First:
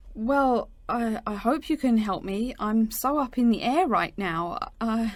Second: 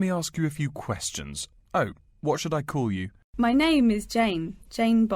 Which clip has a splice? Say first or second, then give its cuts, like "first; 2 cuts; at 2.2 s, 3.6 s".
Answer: second; 2 cuts; at 3.2 s, 3.9 s